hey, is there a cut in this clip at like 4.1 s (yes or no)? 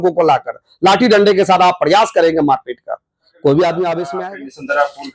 yes